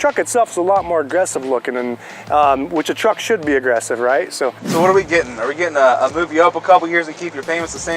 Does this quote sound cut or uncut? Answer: cut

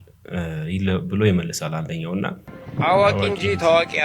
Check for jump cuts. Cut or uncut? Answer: cut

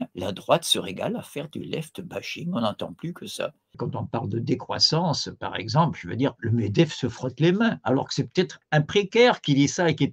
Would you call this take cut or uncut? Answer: cut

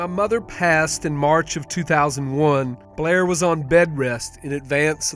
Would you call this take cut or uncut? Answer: cut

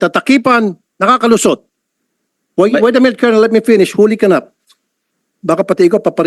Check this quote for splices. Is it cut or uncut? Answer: cut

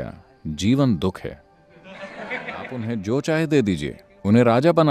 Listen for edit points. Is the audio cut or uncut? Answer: cut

